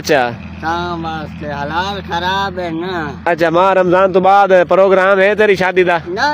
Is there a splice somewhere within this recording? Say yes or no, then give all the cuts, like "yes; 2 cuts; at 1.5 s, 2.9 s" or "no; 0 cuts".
no; 0 cuts